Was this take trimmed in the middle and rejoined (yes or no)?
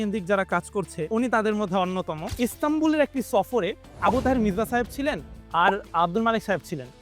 yes